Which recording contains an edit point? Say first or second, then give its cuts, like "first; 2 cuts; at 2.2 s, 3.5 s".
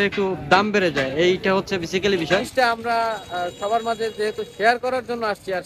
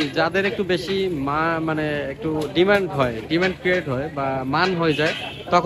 first; 1 cut; at 2.5 s